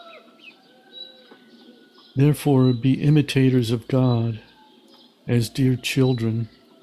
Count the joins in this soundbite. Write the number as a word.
one